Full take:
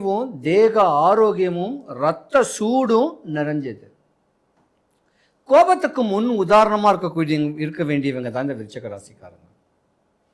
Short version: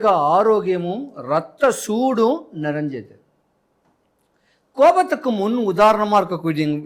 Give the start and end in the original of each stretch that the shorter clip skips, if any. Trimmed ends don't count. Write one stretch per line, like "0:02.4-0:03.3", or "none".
none